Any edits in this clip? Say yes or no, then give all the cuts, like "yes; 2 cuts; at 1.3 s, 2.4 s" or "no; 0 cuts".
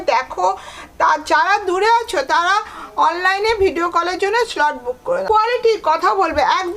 yes; 1 cut; at 5.2 s